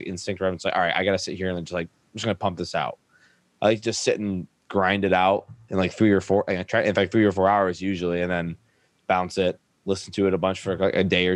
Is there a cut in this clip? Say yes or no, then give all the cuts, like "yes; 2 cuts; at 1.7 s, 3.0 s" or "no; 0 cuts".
yes; 2 cuts; at 5.6 s, 8.9 s